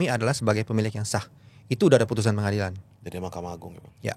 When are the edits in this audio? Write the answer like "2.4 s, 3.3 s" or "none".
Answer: none